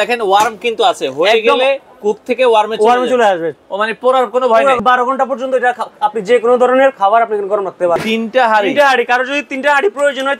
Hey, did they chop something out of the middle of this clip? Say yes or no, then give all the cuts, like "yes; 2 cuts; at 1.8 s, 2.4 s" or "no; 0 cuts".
yes; 2 cuts; at 4.8 s, 8.0 s